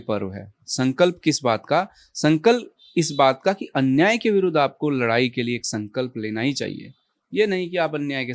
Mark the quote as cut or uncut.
uncut